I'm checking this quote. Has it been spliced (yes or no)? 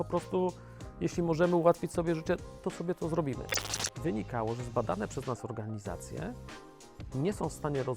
yes